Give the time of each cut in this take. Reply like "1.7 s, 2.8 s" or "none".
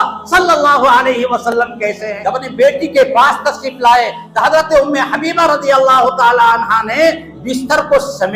2.1 s